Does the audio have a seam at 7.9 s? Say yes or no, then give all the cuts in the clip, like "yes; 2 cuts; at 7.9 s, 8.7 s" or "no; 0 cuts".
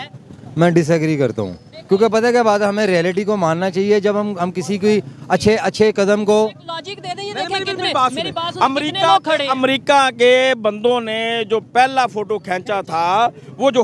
no; 0 cuts